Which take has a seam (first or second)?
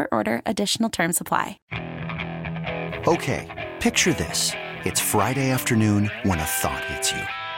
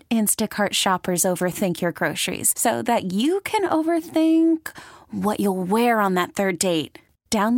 first